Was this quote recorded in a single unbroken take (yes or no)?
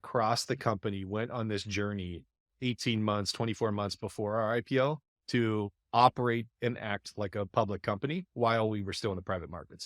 no